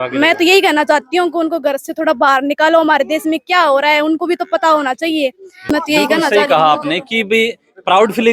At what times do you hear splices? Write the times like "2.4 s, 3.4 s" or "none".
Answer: none